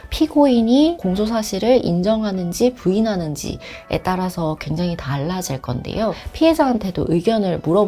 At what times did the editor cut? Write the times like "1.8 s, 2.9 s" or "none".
6.2 s